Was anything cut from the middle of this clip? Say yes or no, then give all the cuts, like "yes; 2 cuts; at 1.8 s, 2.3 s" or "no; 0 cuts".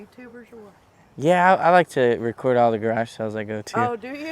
no; 0 cuts